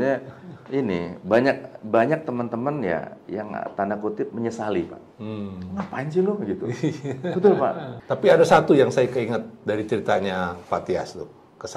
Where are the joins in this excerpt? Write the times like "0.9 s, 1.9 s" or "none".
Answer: 7.9 s